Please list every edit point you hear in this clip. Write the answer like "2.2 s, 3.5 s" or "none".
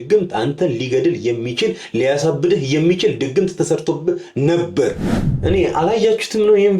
5.3 s